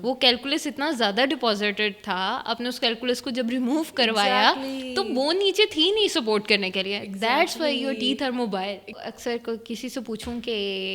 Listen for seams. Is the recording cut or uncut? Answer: cut